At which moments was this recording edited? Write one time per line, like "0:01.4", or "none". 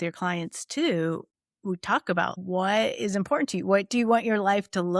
0:02.3